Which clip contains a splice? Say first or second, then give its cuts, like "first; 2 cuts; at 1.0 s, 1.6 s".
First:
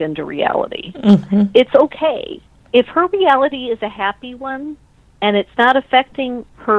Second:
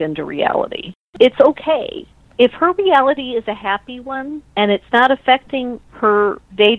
second; 2 cuts; at 1.1 s, 4.4 s